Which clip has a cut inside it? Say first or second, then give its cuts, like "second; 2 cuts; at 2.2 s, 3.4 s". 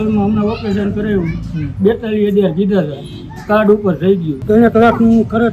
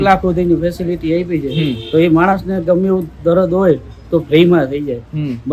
first; 1 cut; at 4.4 s